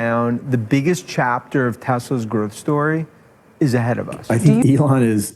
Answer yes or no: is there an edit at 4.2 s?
yes